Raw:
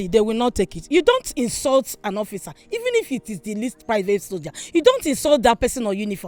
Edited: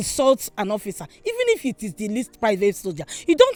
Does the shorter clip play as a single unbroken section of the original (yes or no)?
yes